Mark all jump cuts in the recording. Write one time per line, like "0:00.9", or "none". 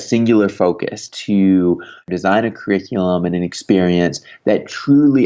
0:01.1
0:02.1